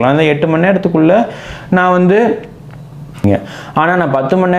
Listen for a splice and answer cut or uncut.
cut